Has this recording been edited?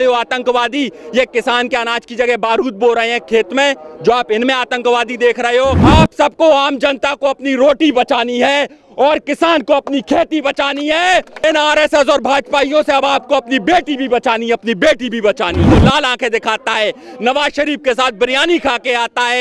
yes; 3 cuts; at 5.8 s, 11.4 s, 15.7 s

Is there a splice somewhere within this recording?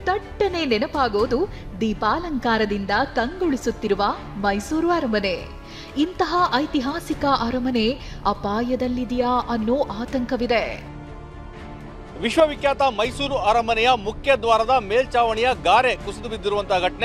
no; 0 cuts

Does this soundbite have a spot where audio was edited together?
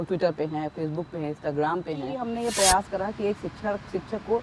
yes; 1 cut; at 2.2 s

